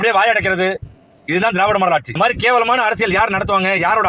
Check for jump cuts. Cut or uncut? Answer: cut